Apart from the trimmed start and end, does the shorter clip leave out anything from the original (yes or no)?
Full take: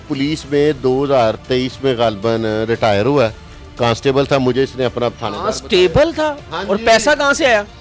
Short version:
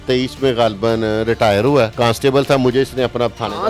yes